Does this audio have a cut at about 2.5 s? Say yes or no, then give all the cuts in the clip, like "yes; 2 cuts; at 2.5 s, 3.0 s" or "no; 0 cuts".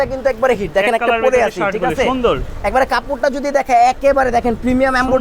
yes; 1 cut; at 2.5 s